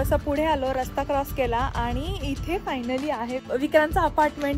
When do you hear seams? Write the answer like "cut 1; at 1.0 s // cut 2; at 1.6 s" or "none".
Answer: cut 1; at 3.5 s